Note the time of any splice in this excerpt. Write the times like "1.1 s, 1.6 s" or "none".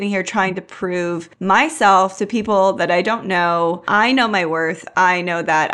1.3 s, 3.8 s

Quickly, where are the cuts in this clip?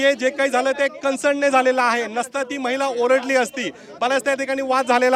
none

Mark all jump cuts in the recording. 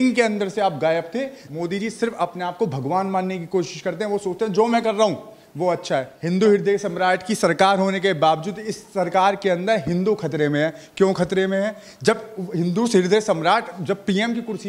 1.4 s, 6.1 s

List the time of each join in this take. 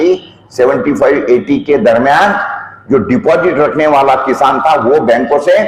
none

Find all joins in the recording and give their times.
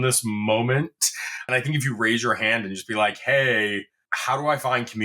1.4 s

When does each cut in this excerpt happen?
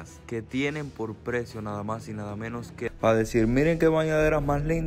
2.8 s

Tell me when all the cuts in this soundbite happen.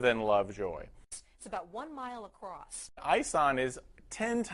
1.1 s, 2.9 s

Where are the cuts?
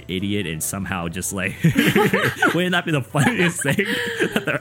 none

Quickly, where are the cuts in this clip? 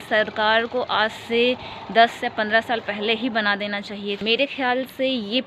4.2 s

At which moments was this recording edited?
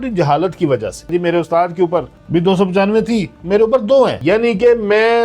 1.1 s, 2.2 s, 4.2 s

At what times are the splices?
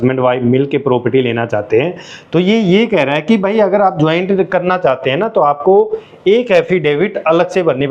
none

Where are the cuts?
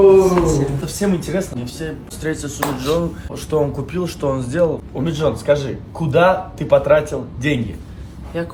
none

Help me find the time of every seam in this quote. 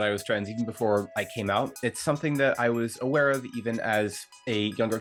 none

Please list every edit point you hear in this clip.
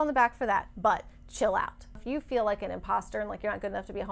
2.0 s

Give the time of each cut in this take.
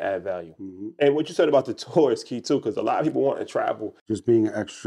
3.9 s

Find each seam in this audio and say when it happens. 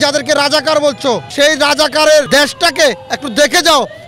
1.3 s, 2.3 s

